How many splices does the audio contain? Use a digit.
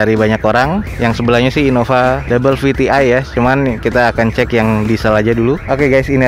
0